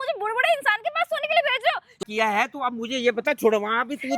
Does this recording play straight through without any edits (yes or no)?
no